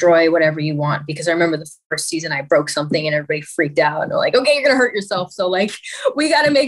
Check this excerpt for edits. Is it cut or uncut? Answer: uncut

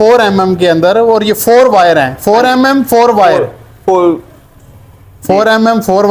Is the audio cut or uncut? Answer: uncut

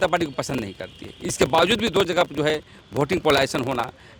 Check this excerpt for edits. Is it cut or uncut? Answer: uncut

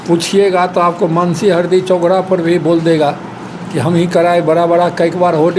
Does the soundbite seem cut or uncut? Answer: uncut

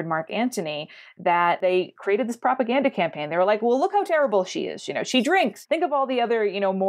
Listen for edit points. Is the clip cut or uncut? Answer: uncut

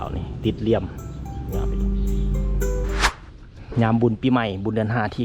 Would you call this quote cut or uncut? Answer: cut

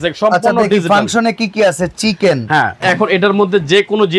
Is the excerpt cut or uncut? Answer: cut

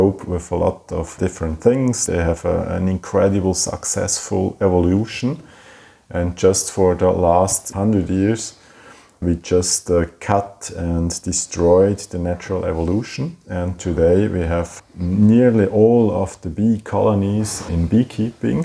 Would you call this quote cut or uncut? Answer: cut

